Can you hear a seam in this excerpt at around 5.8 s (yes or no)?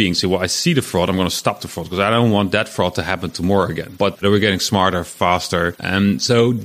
yes